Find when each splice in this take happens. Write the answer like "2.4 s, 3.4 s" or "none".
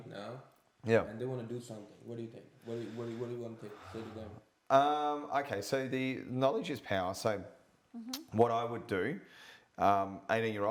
none